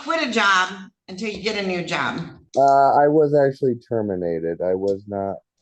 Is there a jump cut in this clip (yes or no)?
yes